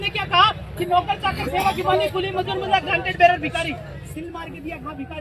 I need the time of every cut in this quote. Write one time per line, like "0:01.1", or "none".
none